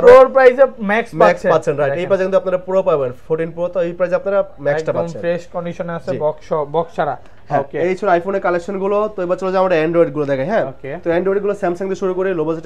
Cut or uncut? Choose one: uncut